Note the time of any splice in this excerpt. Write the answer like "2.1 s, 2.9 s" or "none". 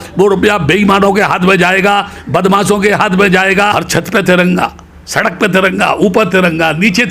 3.7 s